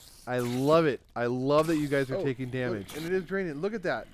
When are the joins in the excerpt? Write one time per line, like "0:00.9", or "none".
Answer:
0:02.9